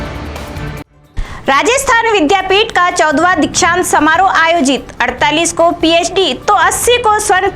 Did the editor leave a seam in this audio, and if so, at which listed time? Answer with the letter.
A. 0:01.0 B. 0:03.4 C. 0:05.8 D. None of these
A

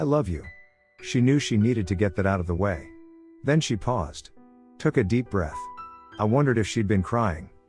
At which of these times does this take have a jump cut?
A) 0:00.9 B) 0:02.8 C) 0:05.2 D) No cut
A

